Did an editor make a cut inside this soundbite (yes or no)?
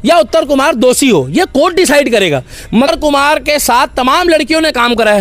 yes